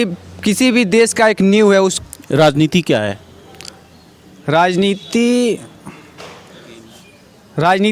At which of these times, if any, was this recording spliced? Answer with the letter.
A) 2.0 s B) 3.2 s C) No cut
A